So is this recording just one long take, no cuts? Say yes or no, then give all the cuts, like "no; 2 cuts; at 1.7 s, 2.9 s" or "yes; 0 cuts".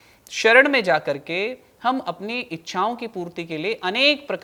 yes; 0 cuts